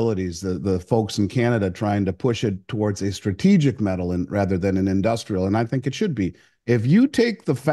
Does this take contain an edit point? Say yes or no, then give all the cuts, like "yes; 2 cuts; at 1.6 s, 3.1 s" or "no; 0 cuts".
yes; 1 cut; at 6.5 s